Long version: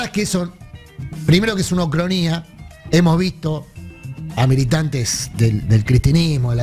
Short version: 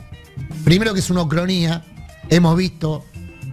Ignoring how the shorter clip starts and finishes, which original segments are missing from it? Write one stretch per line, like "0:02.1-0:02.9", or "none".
none